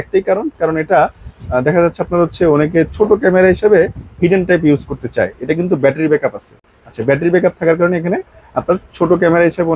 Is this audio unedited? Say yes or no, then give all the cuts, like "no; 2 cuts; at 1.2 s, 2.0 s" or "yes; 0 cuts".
yes; 0 cuts